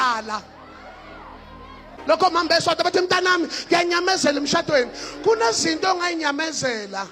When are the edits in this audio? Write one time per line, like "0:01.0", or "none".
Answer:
0:02.0